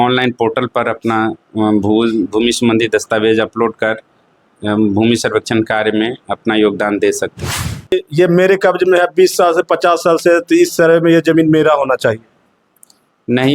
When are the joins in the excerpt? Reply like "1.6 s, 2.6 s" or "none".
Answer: 7.9 s